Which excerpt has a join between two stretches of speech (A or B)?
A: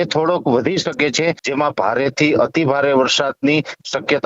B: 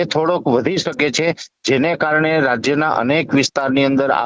A